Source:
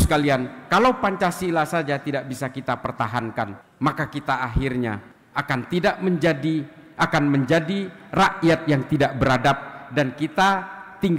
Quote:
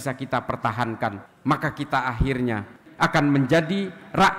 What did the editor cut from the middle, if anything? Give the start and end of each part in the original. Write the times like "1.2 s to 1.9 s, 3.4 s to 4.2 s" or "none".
5.2 s to 6.8 s